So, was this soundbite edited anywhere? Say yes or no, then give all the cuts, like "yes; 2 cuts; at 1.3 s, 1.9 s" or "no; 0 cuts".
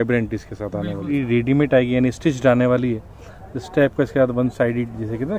yes; 1 cut; at 1.1 s